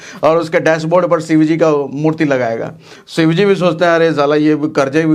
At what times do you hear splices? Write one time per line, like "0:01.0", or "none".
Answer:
none

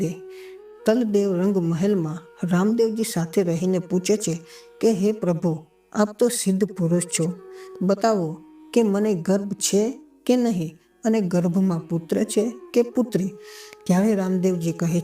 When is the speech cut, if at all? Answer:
none

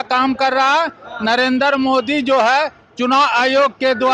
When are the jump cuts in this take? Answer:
none

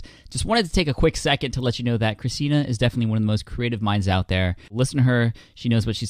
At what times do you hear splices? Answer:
0:04.7

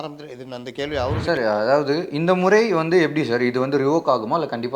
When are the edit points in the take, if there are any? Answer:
0:01.2

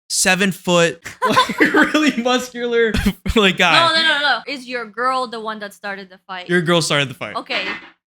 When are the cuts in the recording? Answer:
0:01.1
0:03.0
0:04.5

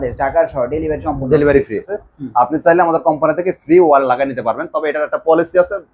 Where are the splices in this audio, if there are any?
0:02.0

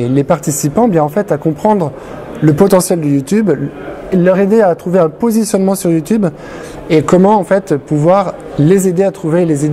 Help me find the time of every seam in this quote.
none

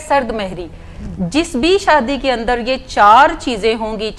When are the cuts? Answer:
none

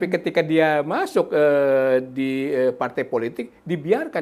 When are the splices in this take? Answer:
none

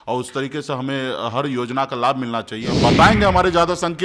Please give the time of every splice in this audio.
0:02.8

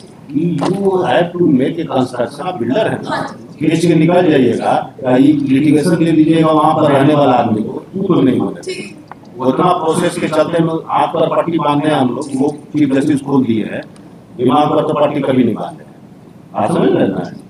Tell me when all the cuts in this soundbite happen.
none

